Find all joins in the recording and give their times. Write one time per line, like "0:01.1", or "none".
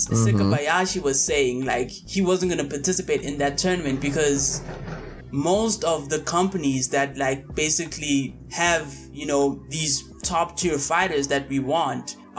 none